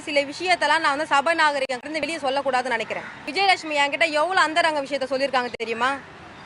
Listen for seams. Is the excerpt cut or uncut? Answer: cut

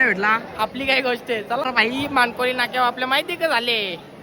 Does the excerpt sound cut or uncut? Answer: cut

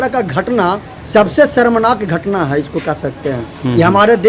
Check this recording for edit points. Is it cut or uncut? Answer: uncut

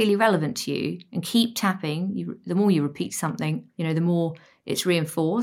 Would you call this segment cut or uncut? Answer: cut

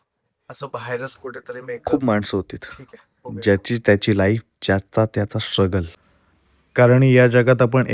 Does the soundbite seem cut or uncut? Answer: cut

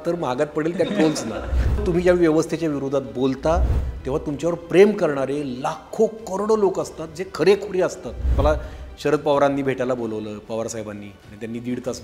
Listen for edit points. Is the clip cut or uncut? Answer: cut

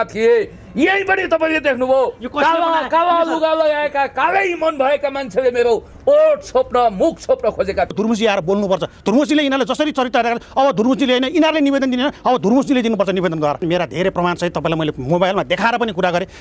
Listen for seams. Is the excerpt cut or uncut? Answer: cut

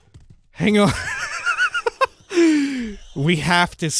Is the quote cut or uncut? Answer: uncut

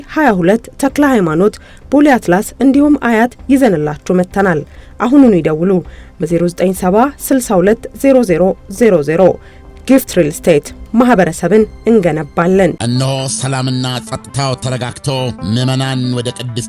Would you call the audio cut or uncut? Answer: cut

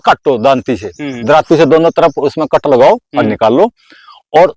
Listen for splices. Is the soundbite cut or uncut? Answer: uncut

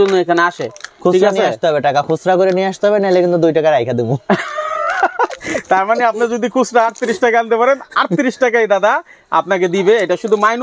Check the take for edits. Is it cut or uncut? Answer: uncut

